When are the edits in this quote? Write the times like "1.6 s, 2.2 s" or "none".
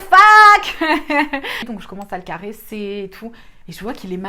1.5 s